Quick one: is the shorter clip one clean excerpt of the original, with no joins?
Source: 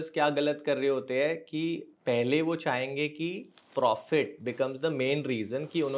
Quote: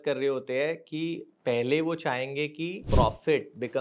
no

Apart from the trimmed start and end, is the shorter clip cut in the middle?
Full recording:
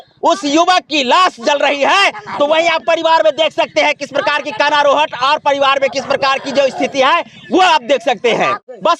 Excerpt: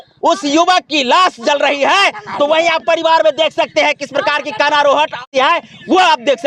yes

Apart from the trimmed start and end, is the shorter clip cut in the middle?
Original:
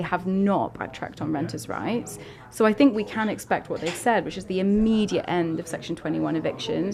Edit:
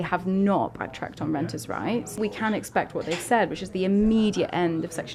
yes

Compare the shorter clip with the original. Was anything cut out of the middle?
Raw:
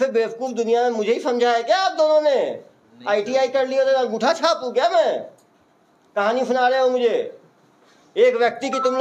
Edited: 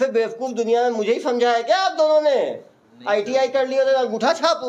no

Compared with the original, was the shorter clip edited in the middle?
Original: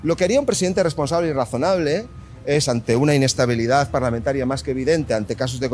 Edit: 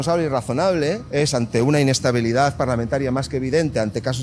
yes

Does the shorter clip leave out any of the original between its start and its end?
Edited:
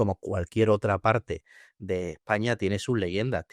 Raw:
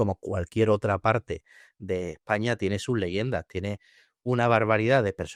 no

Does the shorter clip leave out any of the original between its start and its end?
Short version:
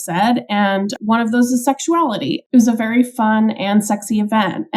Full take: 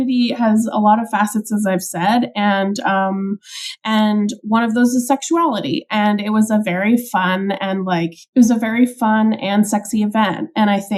yes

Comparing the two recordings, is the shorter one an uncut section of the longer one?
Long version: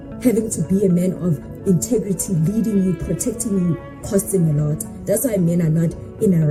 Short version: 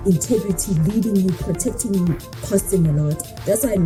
yes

